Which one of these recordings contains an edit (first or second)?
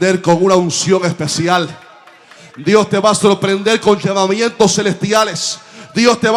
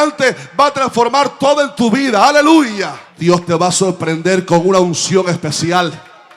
second